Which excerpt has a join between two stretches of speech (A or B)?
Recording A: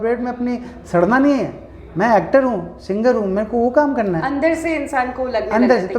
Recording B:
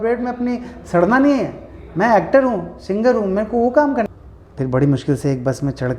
B